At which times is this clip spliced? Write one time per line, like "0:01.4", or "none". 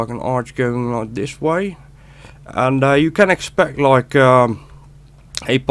0:02.3